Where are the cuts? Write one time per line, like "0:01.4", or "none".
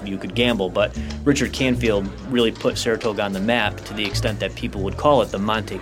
none